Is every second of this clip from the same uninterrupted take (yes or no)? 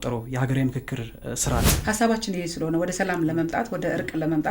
no